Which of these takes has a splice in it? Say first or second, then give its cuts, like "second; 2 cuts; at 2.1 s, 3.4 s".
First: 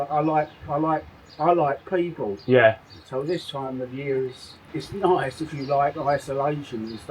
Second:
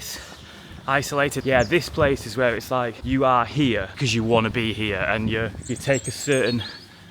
second; 4 cuts; at 1.4 s, 3.0 s, 3.9 s, 5.6 s